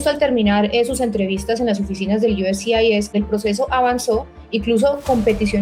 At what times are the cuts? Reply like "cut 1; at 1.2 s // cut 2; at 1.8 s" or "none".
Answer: cut 1; at 3.1 s